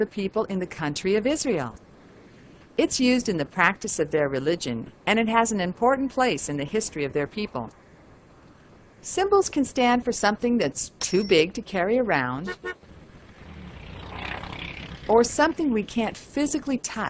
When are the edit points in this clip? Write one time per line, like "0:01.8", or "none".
none